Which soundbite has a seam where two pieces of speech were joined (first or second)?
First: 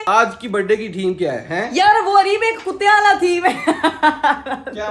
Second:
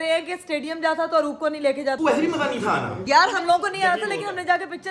second